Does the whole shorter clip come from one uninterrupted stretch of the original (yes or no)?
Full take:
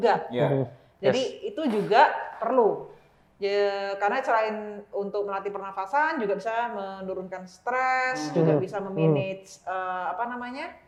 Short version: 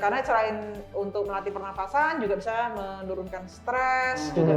yes